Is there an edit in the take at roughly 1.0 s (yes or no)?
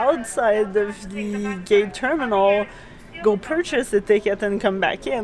no